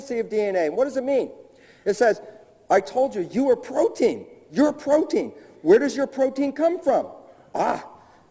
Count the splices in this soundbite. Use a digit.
1